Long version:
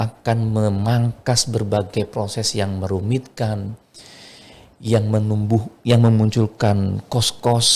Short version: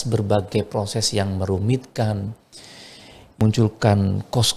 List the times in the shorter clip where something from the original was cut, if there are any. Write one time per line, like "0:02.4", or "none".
0:03.4